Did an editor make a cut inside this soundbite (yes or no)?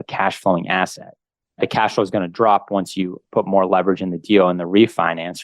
yes